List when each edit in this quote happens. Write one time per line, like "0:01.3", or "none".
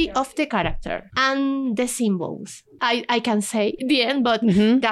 0:01.0
0:02.8
0:03.8